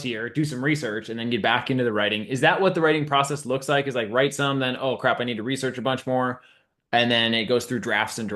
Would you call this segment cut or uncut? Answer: uncut